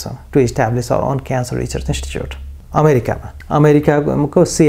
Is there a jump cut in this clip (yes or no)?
no